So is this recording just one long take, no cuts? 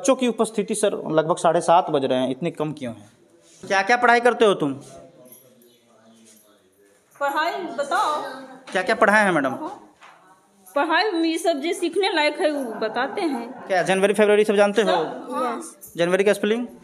no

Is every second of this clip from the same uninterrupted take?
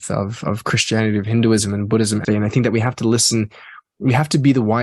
no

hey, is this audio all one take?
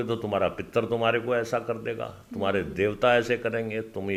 yes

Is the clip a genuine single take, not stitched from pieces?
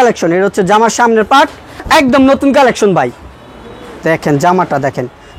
no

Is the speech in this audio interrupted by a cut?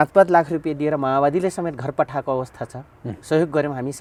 no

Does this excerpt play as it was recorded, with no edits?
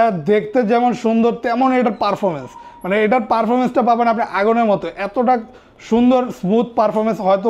yes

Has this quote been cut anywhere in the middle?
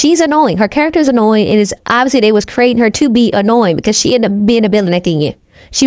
no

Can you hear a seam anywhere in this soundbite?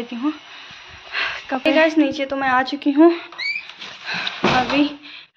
yes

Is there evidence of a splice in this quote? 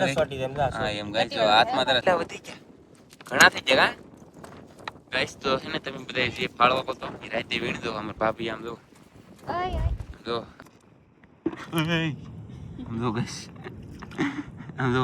yes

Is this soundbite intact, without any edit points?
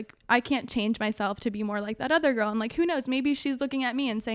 yes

